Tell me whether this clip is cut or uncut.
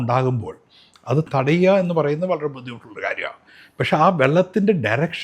cut